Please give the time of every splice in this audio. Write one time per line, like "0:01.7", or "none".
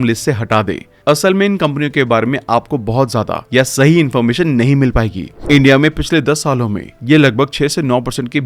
0:05.3